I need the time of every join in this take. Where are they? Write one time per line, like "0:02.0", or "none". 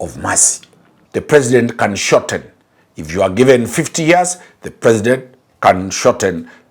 0:01.0